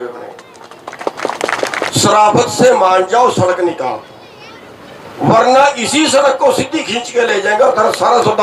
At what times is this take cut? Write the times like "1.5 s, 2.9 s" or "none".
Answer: 1.9 s

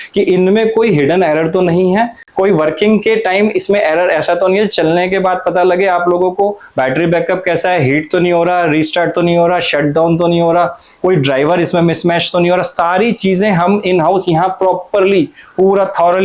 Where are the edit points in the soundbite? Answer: none

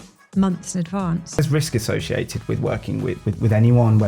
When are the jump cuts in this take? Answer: 1.3 s

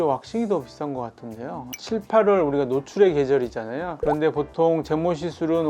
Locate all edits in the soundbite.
1.7 s

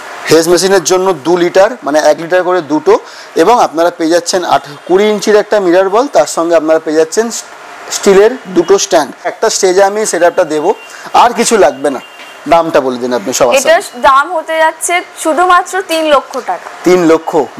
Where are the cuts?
9.4 s

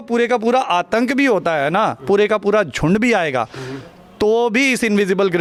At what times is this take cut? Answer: none

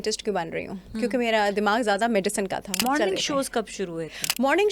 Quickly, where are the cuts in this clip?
2.8 s

